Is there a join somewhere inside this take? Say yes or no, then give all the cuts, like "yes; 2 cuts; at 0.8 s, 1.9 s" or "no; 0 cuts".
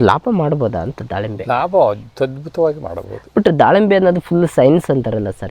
no; 0 cuts